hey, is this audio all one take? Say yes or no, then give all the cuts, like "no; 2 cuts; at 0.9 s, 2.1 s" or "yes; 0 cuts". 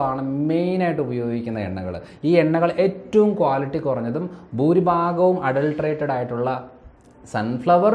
yes; 0 cuts